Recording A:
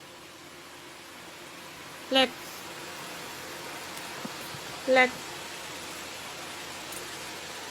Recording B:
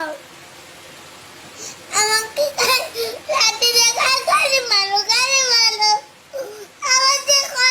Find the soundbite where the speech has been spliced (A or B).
A